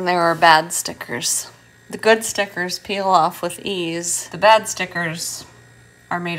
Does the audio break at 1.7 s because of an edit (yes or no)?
no